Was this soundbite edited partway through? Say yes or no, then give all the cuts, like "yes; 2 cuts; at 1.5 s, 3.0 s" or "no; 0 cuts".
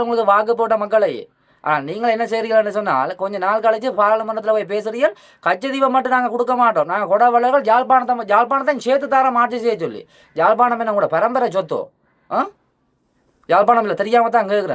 no; 0 cuts